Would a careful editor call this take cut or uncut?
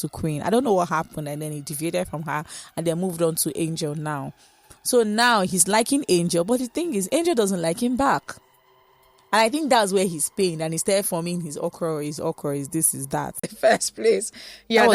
cut